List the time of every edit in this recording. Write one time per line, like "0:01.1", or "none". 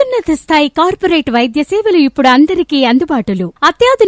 none